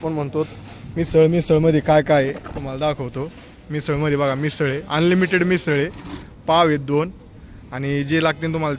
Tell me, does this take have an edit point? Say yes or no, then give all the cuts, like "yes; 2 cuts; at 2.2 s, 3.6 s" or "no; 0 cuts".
no; 0 cuts